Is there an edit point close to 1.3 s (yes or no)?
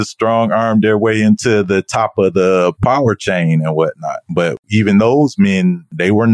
no